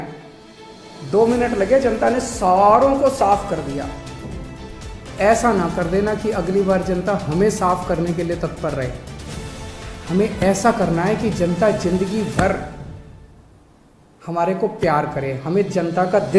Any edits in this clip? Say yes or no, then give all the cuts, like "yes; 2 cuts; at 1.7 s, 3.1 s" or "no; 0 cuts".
no; 0 cuts